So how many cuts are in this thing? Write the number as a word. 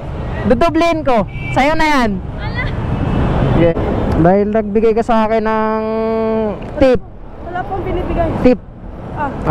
one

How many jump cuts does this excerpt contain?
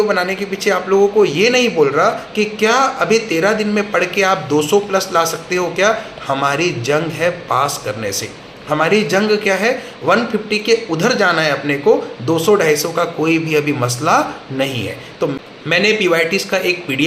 one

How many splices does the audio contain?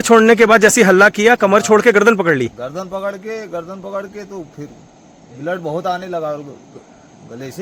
zero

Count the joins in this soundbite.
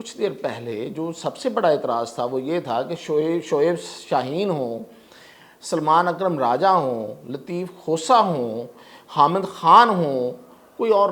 zero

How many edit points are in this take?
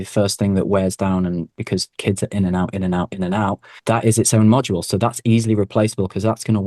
one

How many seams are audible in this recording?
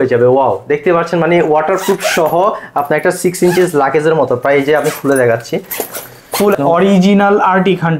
one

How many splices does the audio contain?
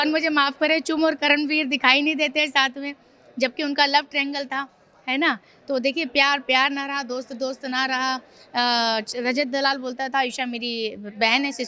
zero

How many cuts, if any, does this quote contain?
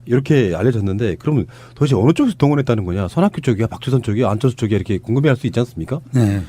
one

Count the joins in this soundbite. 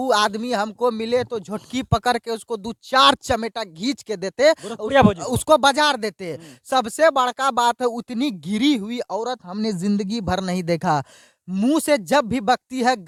zero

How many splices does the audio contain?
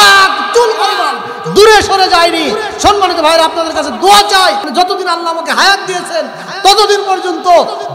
one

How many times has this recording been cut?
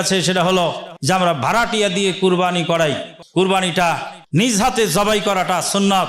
three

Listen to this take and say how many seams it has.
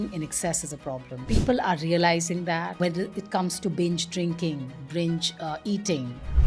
two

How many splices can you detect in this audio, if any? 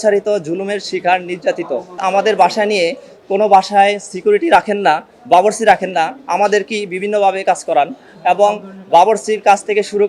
one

